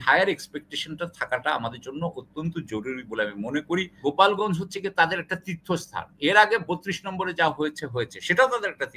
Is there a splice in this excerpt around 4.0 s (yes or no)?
yes